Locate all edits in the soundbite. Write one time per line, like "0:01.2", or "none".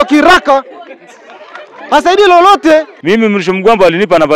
0:02.9